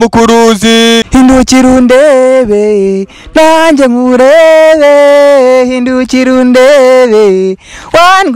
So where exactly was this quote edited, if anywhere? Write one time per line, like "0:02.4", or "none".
0:01.1